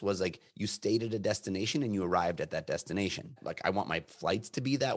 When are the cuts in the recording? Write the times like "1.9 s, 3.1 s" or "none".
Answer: 3.4 s

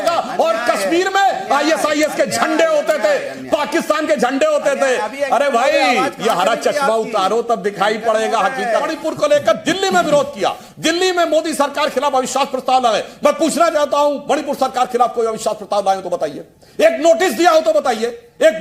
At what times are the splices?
8.9 s

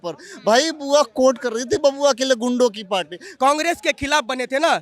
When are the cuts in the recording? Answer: 3.3 s

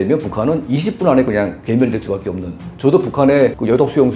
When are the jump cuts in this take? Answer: 2.6 s

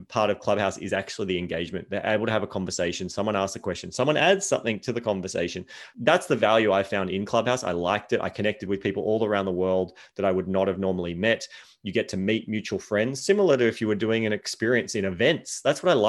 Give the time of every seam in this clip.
none

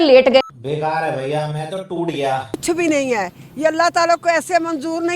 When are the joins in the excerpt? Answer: 2.6 s

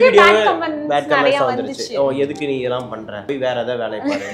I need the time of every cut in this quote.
3.2 s

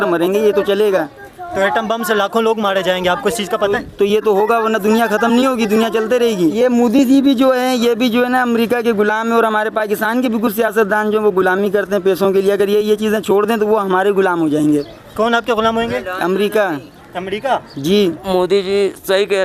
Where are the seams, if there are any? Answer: 6.5 s, 18.2 s

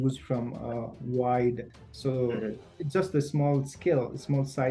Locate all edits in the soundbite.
1.6 s

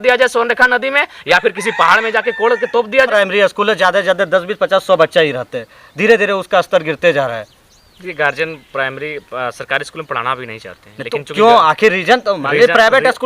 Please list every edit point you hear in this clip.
3.1 s

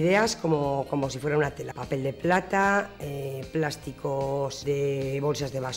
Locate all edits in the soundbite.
1.7 s, 4.6 s

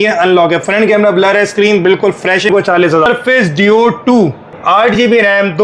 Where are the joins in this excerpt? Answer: 2.9 s, 4.5 s

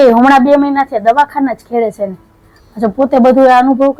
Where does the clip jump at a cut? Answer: none

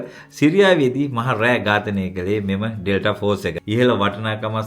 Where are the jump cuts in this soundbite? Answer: 3.6 s

